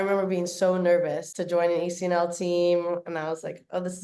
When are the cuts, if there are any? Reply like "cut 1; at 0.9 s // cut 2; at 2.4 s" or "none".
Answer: cut 1; at 1.3 s